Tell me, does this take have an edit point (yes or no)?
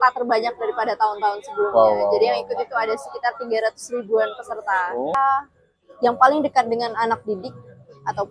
yes